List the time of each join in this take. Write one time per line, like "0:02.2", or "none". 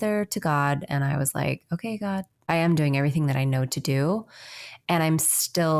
0:02.4